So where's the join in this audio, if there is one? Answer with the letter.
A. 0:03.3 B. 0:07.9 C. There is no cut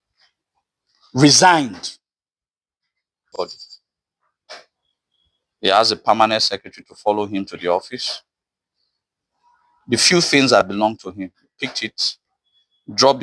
A